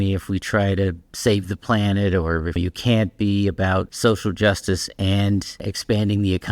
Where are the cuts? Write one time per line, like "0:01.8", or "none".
0:02.6
0:03.9
0:05.6

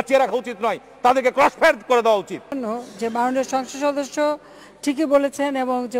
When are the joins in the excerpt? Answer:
0:02.6

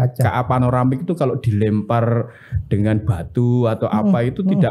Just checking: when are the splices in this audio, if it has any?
none

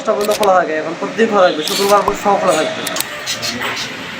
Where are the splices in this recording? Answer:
0:02.9

